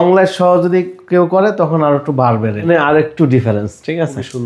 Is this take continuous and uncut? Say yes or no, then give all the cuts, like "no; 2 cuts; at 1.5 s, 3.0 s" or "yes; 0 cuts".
no; 1 cut; at 2.7 s